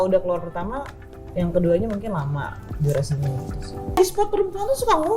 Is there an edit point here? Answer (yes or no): yes